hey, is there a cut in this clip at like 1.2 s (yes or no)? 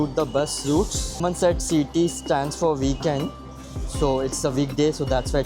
yes